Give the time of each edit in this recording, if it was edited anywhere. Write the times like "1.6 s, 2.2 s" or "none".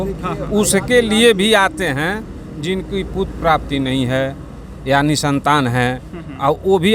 none